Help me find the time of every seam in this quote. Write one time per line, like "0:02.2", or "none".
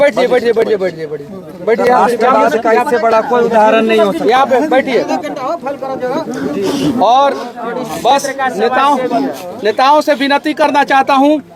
none